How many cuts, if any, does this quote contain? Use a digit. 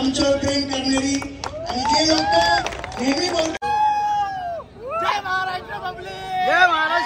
1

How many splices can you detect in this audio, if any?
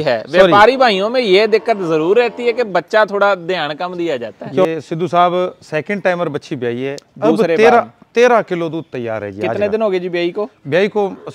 1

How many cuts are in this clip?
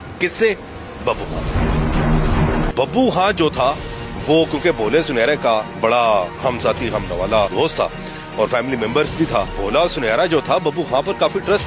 3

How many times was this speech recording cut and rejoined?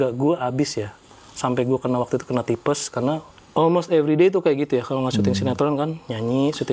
1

